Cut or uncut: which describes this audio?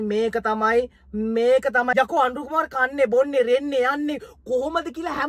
cut